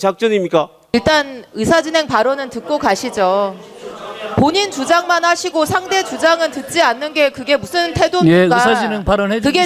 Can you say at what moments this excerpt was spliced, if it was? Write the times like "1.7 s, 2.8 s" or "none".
0.9 s

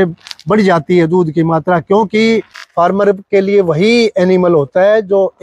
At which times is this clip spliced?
2.6 s

